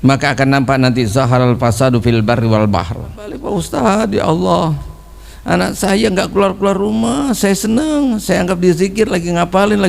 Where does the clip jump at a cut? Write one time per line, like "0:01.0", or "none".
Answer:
0:03.4